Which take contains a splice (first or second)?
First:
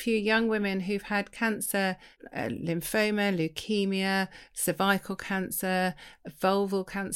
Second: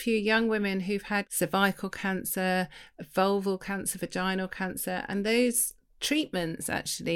second